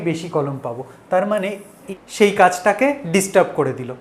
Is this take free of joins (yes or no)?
no